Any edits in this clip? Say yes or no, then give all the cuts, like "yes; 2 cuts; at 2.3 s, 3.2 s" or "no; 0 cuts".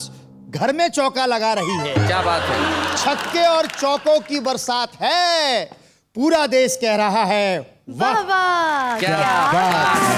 no; 0 cuts